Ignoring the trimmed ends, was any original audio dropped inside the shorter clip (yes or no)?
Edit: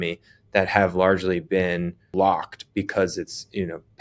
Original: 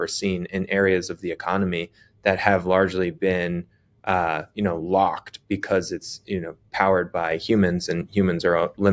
yes